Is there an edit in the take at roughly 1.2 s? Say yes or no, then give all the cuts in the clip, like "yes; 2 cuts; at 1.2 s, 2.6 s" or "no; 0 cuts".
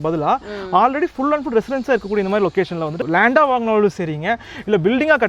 no; 1 cut; at 3.0 s